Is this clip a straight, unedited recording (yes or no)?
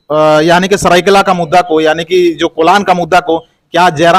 yes